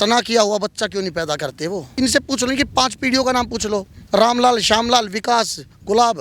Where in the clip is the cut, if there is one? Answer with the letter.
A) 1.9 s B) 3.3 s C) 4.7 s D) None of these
A